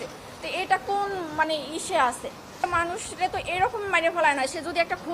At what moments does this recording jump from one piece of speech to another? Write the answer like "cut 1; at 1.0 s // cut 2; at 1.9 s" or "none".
cut 1; at 2.5 s